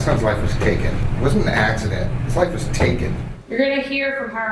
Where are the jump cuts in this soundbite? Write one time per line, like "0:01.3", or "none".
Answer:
0:01.0
0:03.3